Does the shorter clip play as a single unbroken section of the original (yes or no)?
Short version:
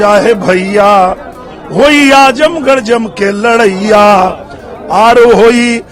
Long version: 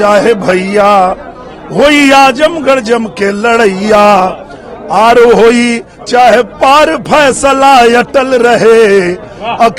yes